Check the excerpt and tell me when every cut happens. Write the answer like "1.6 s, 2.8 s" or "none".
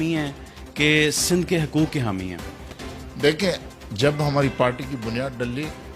none